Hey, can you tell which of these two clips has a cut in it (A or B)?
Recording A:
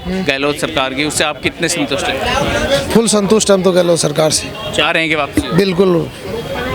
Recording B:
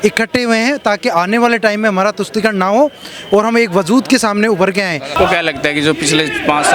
B